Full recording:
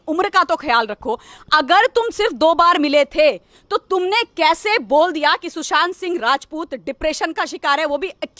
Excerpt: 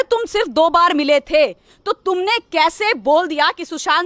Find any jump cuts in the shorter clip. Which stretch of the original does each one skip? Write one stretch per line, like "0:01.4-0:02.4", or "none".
none